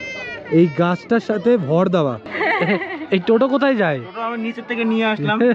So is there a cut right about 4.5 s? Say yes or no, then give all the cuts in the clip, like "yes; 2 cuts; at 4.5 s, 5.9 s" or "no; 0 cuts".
no; 1 cut; at 2.3 s